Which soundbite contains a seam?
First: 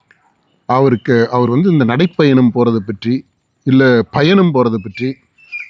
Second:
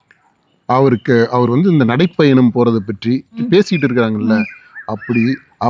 second; 1 cut; at 3.4 s

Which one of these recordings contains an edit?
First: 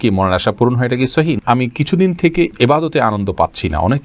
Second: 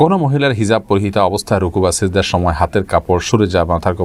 first; 1 cut; at 1.4 s

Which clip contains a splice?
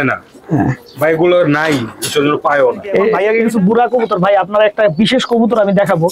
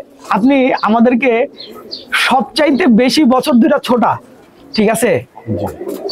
first; 1 cut; at 3.2 s

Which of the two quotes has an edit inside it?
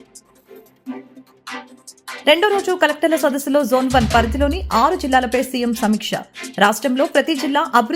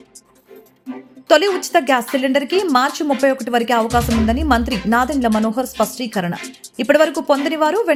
first; 2 cuts; at 1.1 s, 2.2 s

